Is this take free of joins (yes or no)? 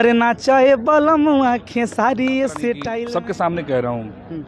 no